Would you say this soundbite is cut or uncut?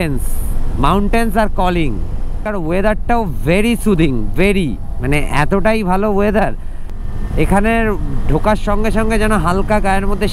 uncut